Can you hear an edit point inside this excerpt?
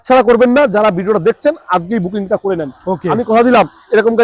no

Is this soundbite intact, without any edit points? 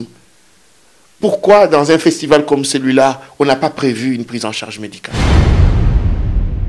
no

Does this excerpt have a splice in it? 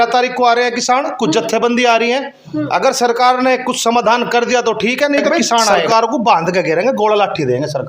yes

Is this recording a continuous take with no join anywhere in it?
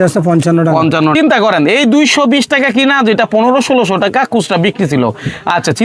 no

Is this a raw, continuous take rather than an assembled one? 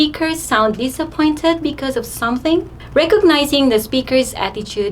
no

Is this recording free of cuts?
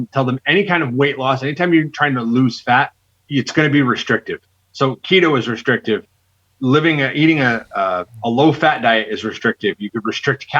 yes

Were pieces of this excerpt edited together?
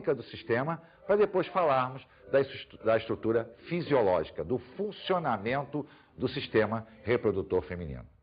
yes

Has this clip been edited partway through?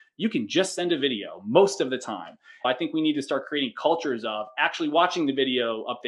yes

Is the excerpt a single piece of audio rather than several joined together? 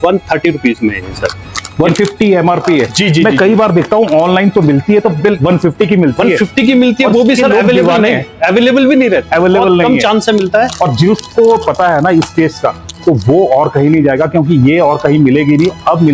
yes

